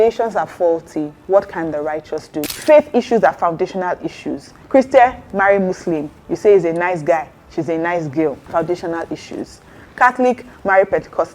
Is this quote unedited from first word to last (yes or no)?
no